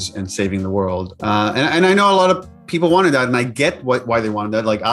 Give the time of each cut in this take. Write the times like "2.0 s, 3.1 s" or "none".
1.1 s